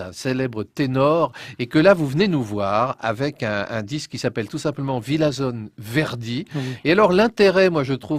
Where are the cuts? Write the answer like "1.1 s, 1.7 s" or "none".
3.0 s